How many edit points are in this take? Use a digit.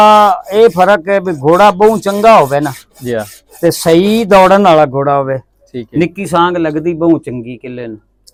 0